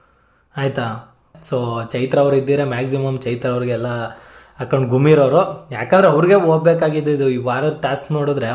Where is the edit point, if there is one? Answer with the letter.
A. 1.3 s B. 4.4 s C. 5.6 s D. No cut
A